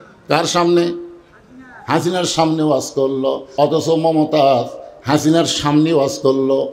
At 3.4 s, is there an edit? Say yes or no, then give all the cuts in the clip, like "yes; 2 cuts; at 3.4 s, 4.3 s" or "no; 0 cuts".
yes; 1 cut; at 3.4 s